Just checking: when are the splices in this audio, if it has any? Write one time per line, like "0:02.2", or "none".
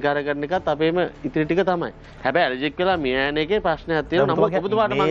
none